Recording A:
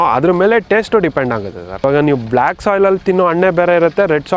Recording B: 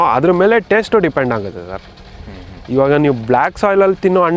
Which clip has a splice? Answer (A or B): A